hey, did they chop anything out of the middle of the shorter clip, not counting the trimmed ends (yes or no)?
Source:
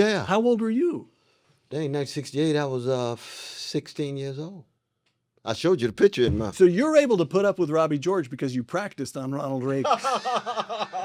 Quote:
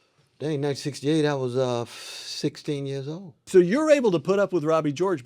yes